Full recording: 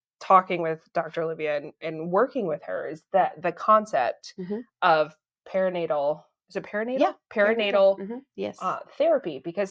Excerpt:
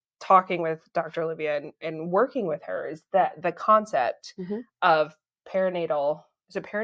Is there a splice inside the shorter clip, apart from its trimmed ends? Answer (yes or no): no